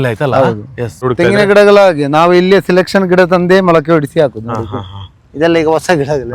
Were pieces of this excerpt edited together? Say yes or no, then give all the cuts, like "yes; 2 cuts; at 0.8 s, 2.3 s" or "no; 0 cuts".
yes; 1 cut; at 1.0 s